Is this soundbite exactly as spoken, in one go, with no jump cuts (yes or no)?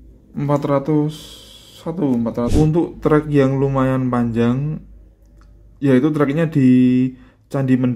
no